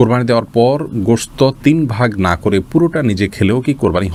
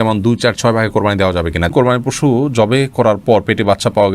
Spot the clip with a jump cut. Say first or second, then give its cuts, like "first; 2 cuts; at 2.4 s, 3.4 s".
second; 1 cut; at 1.7 s